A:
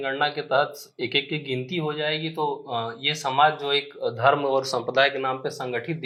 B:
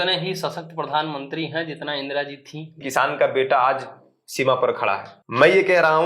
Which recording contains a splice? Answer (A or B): B